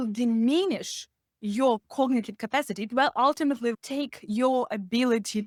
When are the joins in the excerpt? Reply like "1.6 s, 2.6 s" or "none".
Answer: none